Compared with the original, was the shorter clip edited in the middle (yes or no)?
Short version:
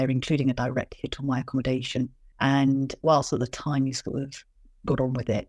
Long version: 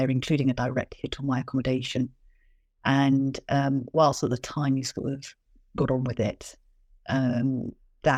yes